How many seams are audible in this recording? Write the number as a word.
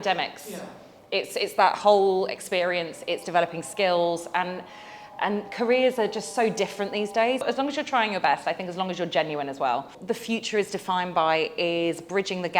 two